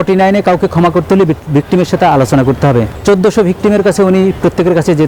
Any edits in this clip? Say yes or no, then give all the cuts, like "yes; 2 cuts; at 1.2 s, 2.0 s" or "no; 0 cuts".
yes; 1 cut; at 2.9 s